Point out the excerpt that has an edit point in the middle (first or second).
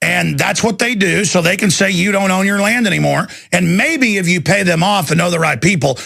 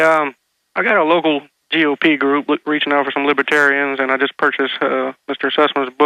first